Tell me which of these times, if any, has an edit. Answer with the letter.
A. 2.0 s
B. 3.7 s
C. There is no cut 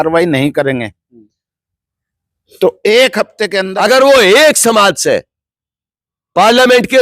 B